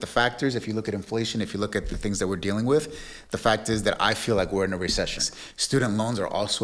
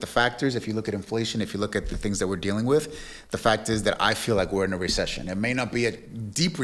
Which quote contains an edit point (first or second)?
first